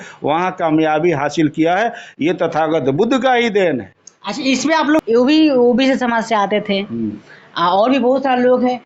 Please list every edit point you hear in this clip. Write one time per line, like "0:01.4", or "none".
0:05.0